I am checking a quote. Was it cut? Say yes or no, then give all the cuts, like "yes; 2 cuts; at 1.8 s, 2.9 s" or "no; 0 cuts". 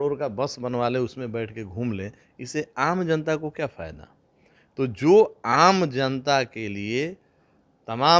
no; 0 cuts